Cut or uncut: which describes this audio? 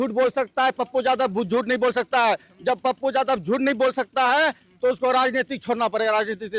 uncut